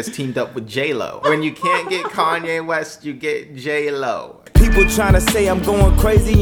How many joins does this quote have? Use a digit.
2